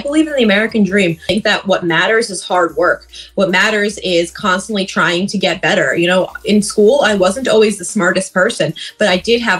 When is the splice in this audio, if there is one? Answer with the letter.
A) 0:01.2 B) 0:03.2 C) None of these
A